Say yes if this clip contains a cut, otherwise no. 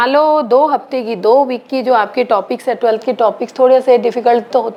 no